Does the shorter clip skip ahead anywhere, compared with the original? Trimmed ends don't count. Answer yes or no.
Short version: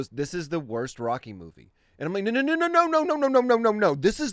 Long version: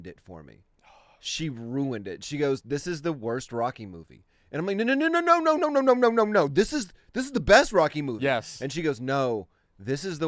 no